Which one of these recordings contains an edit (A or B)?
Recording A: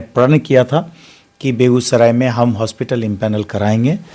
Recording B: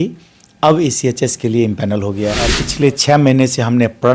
B